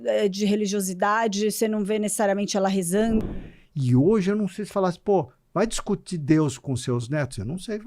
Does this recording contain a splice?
yes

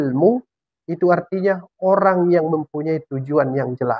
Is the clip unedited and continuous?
yes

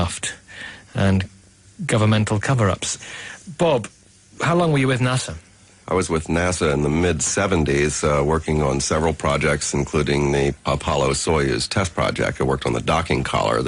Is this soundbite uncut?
no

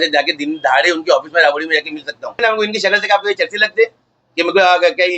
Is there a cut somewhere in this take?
yes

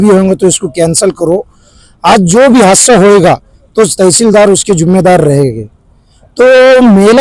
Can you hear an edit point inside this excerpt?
no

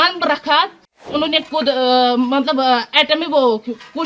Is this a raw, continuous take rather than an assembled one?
no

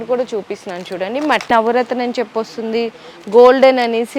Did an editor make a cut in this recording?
yes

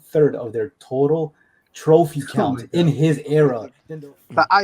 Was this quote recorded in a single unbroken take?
no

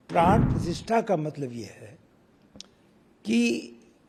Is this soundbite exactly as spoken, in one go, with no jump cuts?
yes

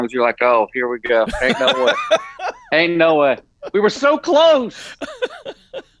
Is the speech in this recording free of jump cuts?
yes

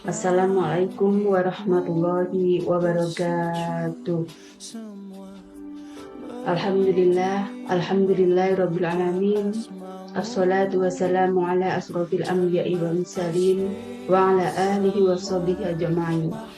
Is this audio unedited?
no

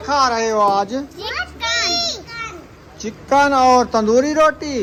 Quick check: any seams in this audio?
no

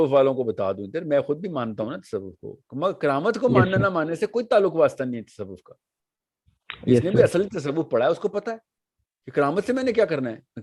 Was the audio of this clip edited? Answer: no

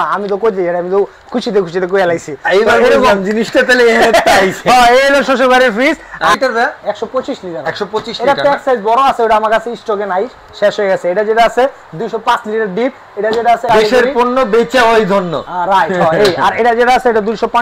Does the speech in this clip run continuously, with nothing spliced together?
no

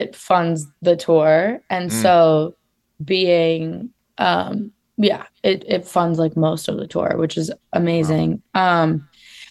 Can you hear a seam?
no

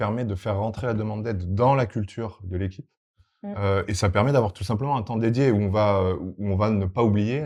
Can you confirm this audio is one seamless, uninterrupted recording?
yes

